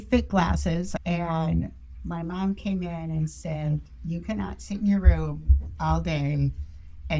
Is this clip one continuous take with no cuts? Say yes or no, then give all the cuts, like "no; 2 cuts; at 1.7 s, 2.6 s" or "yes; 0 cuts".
no; 1 cut; at 0.9 s